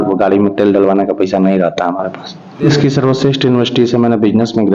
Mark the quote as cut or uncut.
cut